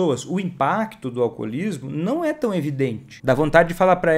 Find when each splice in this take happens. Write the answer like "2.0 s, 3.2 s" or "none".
3.1 s